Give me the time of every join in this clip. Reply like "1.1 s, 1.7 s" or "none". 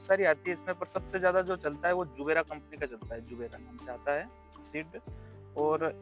none